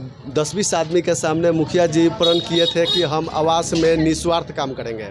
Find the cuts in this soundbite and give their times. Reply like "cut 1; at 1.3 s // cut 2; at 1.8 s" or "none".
none